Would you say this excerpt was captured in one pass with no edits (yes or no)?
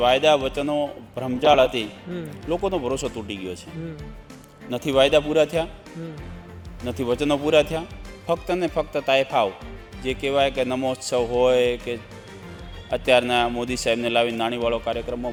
yes